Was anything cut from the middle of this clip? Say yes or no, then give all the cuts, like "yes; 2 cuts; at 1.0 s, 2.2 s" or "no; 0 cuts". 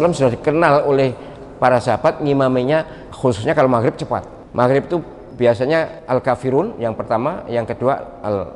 yes; 4 cuts; at 3.0 s, 4.4 s, 5.2 s, 6.0 s